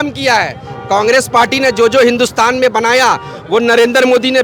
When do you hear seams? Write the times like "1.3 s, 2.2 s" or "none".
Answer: none

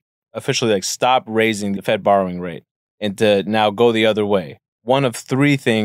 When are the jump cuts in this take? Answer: 1.8 s

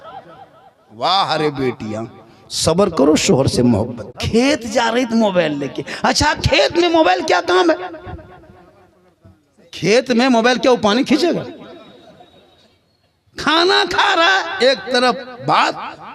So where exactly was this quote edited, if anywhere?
4.2 s

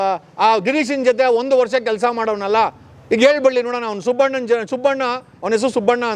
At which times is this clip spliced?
none

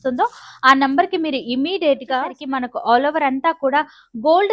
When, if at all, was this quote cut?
2.4 s

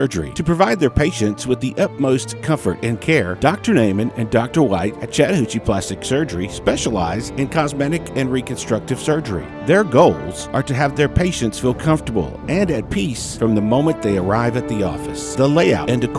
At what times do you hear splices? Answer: none

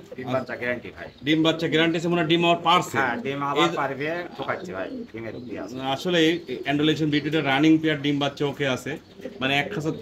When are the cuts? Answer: none

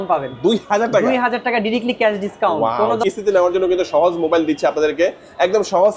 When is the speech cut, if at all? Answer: 3.0 s

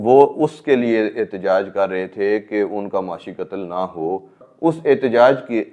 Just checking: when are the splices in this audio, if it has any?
4.4 s

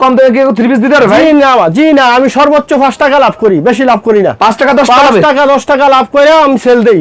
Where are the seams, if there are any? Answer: none

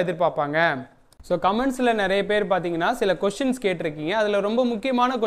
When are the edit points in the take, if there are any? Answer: 1.1 s

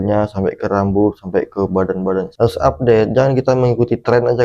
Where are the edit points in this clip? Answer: 2.3 s

